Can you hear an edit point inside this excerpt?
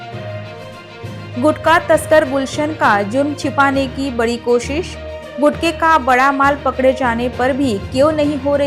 yes; 1 cut; at 1.3 s

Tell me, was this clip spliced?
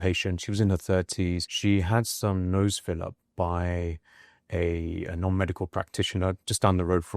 yes; 1 cut; at 1.5 s

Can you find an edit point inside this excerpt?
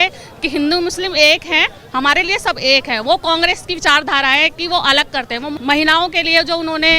yes; 1 cut; at 5.6 s

